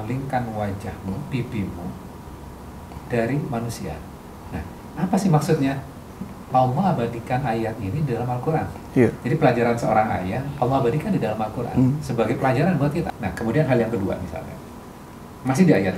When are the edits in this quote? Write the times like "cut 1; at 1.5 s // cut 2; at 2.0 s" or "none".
cut 1; at 6.5 s // cut 2; at 13.1 s